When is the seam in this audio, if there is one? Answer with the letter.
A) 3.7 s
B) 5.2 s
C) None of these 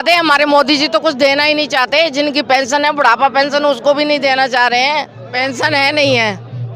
B